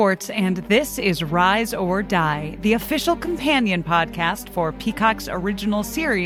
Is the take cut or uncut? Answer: uncut